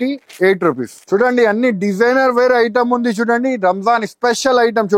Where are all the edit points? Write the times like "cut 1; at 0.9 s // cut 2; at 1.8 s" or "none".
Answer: cut 1; at 1.0 s

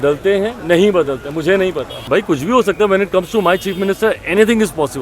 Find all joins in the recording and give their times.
cut 1; at 1.9 s

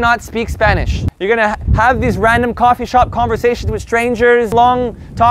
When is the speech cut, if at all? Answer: cut 1; at 1.0 s // cut 2; at 4.5 s

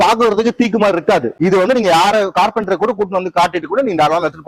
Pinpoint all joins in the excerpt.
cut 1; at 1.3 s

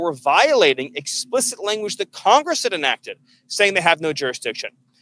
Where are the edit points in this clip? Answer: none

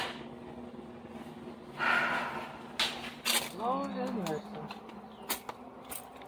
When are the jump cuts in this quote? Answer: cut 1; at 3.2 s

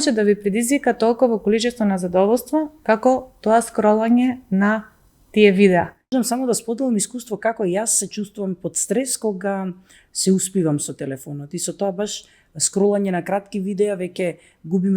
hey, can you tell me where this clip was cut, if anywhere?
cut 1; at 6.0 s

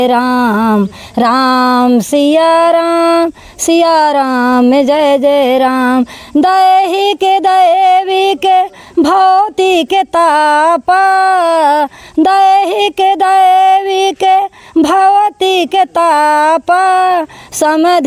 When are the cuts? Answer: none

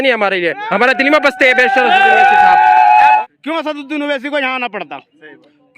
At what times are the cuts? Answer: cut 1; at 3.0 s

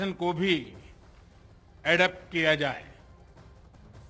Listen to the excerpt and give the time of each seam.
cut 1; at 2.9 s

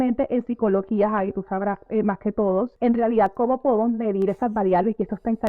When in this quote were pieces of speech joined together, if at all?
cut 1; at 2.7 s

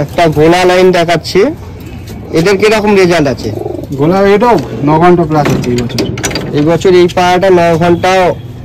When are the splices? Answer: none

